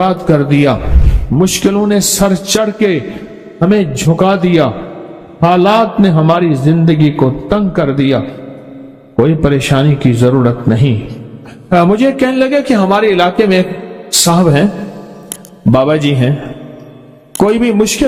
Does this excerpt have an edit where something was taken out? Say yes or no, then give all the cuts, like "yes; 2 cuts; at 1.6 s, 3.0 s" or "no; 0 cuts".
no; 0 cuts